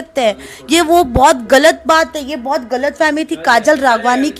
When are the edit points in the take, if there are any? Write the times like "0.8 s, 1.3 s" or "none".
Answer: none